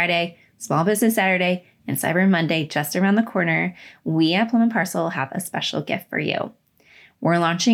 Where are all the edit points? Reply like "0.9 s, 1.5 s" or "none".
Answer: none